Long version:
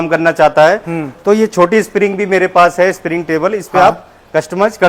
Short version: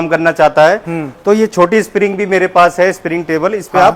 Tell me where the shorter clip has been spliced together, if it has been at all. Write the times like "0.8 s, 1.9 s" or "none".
none